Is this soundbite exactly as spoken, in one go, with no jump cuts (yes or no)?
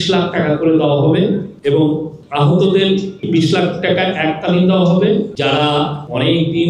no